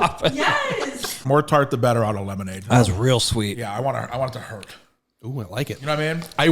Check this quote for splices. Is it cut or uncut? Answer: cut